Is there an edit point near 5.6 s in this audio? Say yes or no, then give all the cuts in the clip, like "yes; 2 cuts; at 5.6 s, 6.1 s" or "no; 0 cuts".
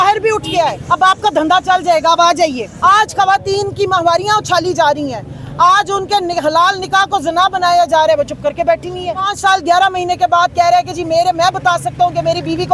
no; 3 cuts; at 0.8 s, 2.7 s, 9.3 s